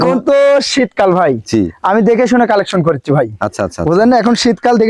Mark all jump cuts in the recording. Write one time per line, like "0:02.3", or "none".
none